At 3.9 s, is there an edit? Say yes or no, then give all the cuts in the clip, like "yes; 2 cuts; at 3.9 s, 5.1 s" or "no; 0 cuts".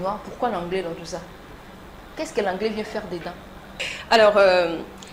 yes; 1 cut; at 3.9 s